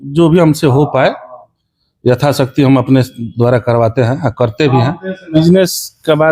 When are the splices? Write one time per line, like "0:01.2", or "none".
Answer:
0:05.3